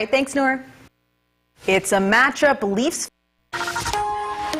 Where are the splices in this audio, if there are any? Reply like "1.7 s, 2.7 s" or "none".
3.0 s